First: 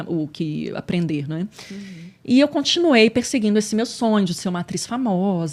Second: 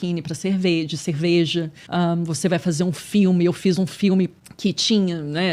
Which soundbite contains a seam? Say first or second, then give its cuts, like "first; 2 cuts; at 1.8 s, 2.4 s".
second; 2 cuts; at 1.8 s, 4.4 s